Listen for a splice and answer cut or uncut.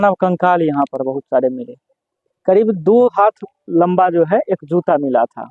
cut